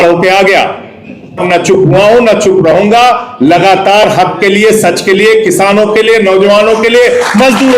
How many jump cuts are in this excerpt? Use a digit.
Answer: 1